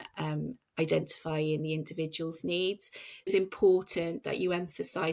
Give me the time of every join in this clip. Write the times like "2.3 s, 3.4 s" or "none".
3.3 s